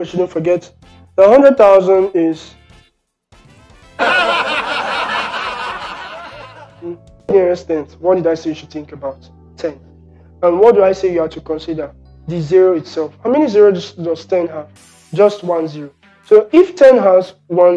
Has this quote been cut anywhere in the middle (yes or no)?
yes